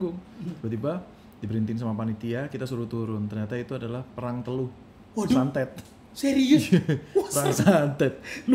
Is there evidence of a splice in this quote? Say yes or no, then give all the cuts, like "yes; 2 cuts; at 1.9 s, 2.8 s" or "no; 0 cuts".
no; 0 cuts